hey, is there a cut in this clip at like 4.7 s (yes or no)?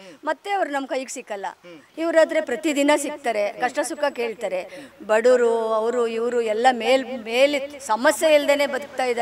no